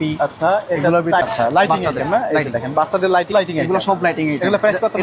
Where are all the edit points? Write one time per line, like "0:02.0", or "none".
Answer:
0:01.2
0:03.3